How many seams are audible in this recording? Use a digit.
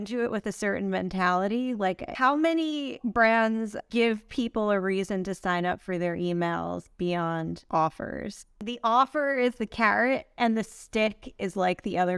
4